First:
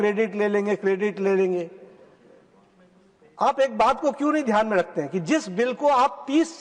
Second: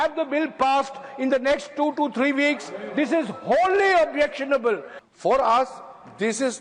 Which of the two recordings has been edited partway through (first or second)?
second